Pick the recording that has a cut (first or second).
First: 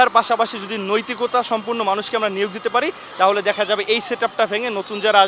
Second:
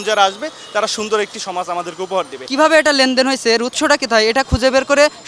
second